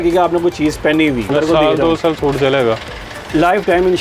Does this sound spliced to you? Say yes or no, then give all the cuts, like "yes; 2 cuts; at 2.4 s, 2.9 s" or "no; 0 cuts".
yes; 1 cut; at 1.3 s